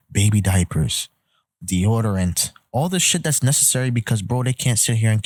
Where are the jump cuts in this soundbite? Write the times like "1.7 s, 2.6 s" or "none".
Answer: none